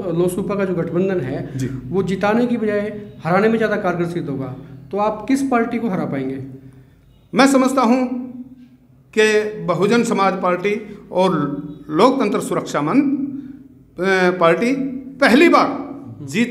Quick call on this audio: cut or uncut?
uncut